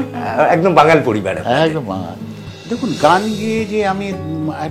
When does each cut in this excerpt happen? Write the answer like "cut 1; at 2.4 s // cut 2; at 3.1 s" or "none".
cut 1; at 2.5 s

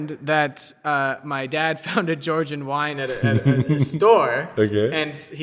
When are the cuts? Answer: none

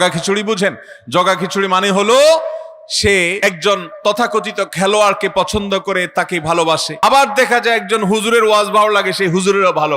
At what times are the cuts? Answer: cut 1; at 3.4 s // cut 2; at 7.0 s

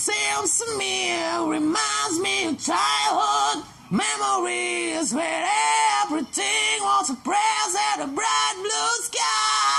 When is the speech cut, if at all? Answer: none

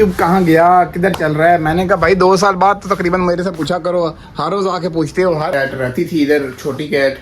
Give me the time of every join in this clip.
cut 1; at 5.5 s

